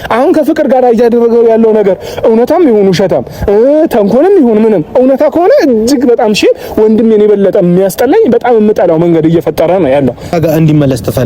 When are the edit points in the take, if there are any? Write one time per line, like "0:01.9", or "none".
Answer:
0:10.3